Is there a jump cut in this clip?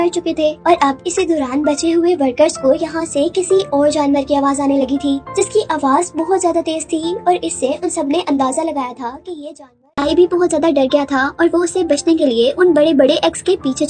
yes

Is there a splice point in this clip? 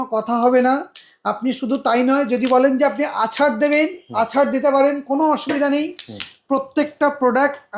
no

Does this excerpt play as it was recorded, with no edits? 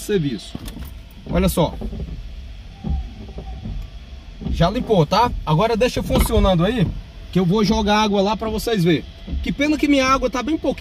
yes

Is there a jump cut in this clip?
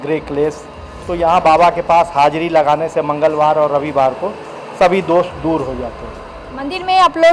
no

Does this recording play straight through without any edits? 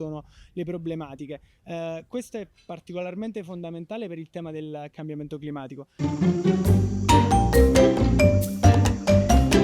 no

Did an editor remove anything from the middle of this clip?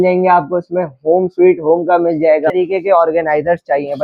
yes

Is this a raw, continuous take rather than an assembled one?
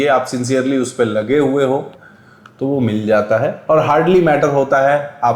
no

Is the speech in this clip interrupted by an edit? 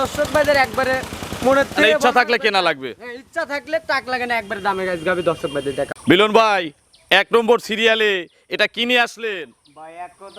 yes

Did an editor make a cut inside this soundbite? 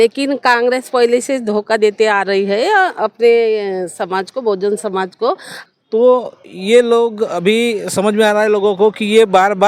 yes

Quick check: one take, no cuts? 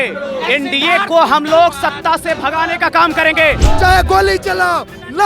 no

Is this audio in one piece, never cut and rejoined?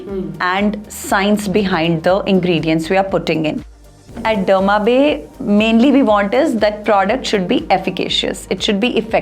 no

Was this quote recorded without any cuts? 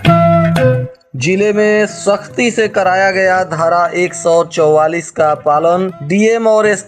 no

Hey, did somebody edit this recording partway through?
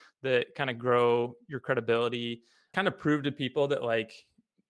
yes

